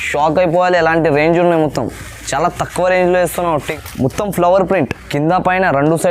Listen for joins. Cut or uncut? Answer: cut